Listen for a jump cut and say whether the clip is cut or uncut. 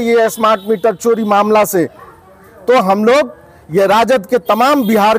uncut